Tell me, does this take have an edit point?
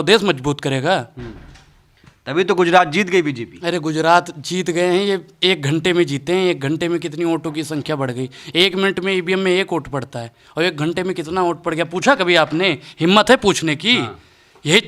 no; 0 cuts

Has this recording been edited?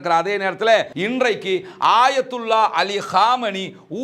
yes; 1 cut; at 0.9 s

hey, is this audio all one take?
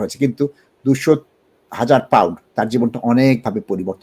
yes; 0 cuts

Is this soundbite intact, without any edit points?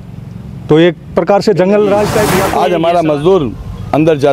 no; 1 cut; at 2.5 s

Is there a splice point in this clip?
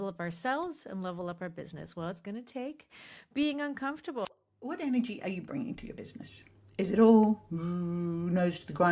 yes; 1 cut; at 4.3 s

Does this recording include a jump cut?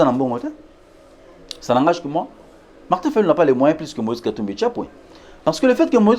no; 0 cuts

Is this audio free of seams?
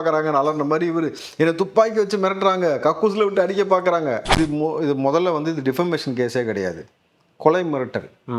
no; 1 cut; at 4.3 s

